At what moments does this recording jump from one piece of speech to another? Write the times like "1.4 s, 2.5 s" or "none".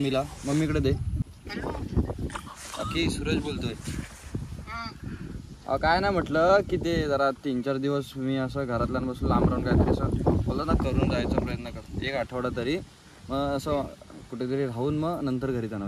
1.2 s